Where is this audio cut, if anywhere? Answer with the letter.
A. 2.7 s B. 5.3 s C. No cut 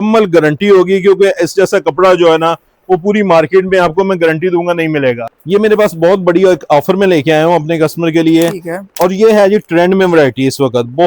B